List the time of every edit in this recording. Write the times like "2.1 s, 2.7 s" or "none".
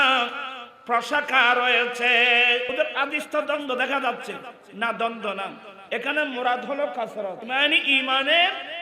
2.7 s, 7.4 s